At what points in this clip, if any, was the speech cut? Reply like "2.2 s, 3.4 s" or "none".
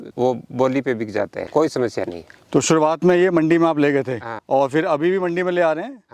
none